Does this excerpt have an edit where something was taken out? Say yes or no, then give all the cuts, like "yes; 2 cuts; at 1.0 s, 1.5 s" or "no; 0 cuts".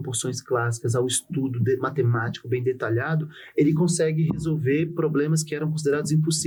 no; 0 cuts